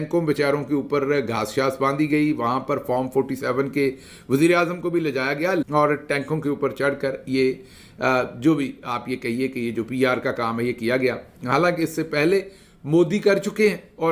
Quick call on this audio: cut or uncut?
uncut